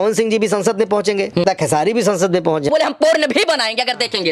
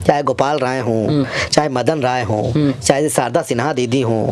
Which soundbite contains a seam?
first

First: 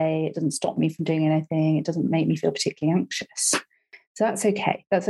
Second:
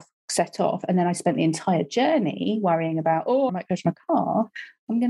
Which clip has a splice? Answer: second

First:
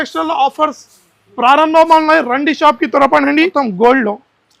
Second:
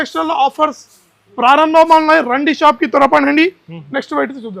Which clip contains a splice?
first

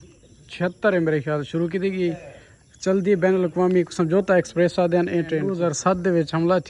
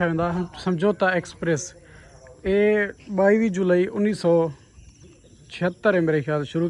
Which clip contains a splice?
first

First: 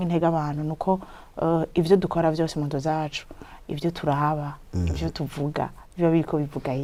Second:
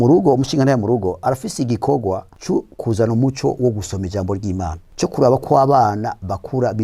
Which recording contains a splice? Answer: second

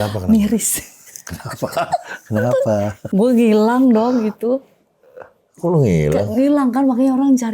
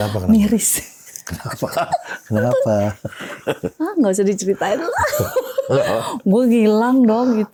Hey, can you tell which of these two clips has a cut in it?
first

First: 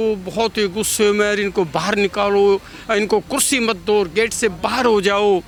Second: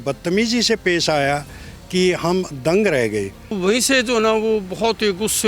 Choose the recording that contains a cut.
second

